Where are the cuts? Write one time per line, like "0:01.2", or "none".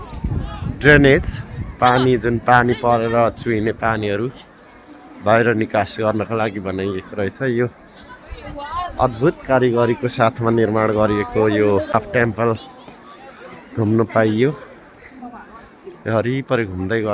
0:11.9